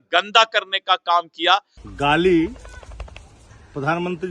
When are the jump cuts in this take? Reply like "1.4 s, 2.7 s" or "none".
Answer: 1.7 s